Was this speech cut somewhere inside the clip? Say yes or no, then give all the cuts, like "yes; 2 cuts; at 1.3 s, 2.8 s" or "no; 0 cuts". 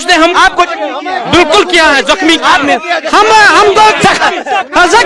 no; 0 cuts